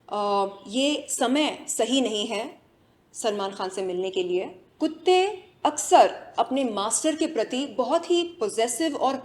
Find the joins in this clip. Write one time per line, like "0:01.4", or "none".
0:04.6